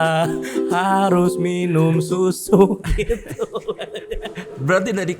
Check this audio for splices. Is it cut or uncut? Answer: uncut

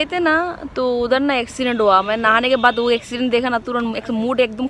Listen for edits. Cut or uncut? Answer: uncut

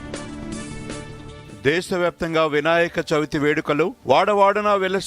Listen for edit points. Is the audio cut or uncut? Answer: cut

